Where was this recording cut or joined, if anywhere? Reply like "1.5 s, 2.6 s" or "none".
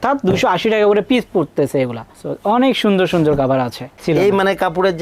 3.9 s